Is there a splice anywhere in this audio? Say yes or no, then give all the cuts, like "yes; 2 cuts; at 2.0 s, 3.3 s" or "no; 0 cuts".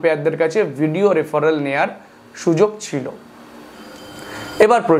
no; 0 cuts